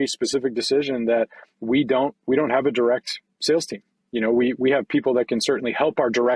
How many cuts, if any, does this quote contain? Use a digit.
0